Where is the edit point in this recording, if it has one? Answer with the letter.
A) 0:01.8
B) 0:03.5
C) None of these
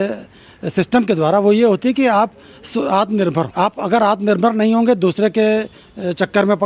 B